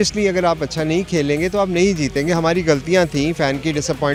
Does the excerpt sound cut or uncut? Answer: uncut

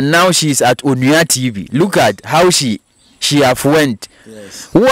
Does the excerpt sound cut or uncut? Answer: uncut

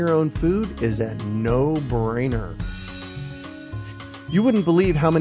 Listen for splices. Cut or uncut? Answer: cut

